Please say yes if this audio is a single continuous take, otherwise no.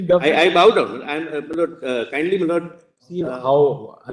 no